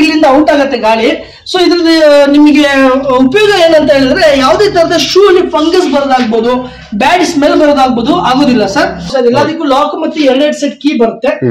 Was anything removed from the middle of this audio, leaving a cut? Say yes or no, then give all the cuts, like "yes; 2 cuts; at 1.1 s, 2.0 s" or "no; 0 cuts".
yes; 1 cut; at 9.1 s